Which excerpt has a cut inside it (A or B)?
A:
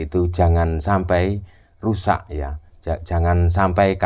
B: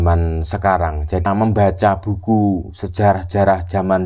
B